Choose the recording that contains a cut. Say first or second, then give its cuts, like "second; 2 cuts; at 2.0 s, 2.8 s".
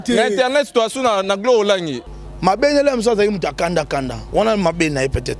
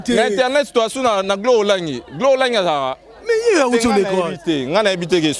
first; 1 cut; at 2.0 s